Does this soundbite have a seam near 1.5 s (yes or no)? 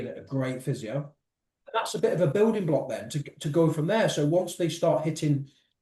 yes